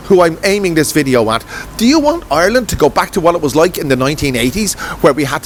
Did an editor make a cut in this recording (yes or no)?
no